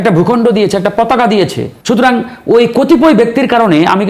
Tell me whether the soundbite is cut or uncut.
cut